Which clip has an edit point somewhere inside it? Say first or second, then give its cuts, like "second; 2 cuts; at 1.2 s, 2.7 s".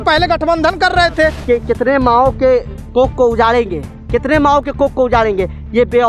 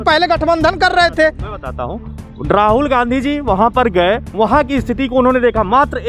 first; 1 cut; at 1.4 s